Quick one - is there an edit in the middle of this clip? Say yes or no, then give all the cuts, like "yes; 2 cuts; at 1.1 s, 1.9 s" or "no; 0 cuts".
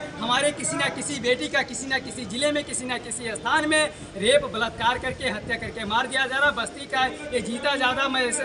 no; 0 cuts